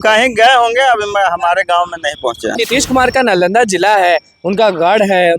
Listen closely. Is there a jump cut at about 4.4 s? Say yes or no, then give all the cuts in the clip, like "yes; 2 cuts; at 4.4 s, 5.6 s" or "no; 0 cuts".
no; 1 cut; at 2.6 s